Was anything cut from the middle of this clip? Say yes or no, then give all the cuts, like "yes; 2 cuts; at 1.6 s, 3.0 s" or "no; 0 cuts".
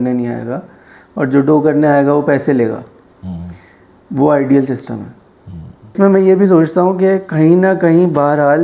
yes; 1 cut; at 5.9 s